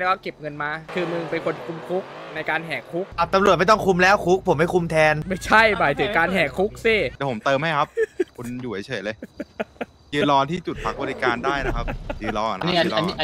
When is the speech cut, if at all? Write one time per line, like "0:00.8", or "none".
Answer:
0:00.9
0:03.1
0:05.3
0:07.1
0:12.1